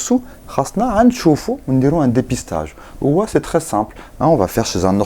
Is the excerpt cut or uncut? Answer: uncut